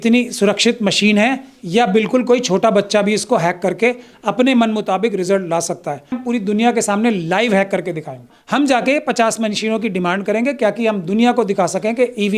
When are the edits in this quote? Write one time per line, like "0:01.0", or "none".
0:06.2
0:08.4

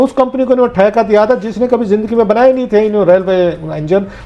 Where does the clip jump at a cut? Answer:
none

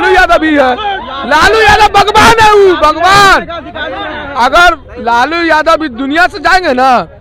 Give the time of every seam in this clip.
none

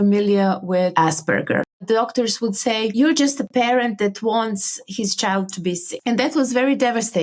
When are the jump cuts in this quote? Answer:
0:01.7

